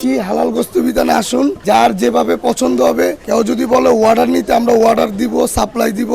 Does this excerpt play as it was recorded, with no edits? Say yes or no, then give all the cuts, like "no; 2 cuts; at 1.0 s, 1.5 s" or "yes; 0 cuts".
no; 1 cut; at 1.6 s